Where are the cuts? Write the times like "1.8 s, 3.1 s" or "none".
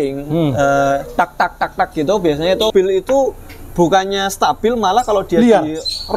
2.7 s

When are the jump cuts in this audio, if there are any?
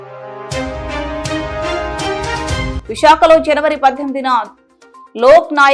none

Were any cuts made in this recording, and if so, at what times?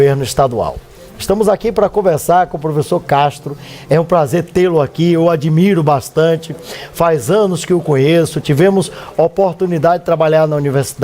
2.5 s

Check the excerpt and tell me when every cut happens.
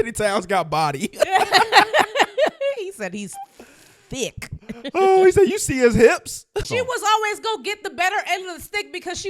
6.7 s

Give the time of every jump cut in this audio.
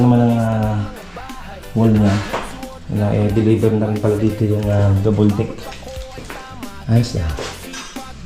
2.3 s

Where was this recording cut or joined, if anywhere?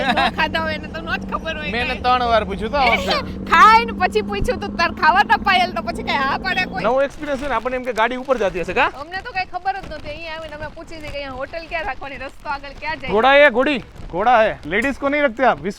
6.7 s, 13.1 s, 14.6 s

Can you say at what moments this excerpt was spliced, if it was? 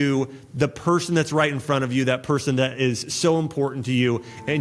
none

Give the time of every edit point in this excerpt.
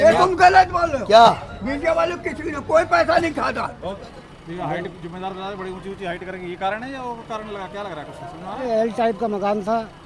3.8 s

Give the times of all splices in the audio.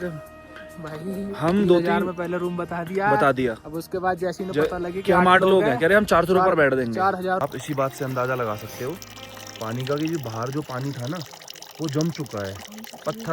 7.4 s

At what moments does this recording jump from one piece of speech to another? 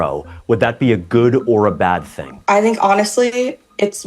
2.3 s

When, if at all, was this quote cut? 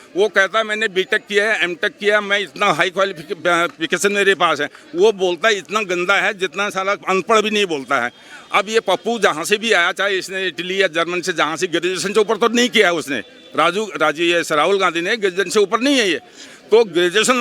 none

